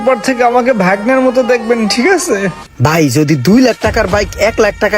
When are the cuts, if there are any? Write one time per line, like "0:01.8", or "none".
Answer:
0:02.6

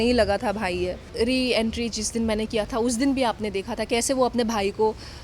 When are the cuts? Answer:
0:01.0

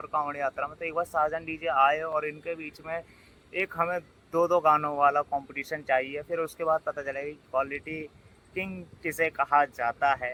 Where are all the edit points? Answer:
none

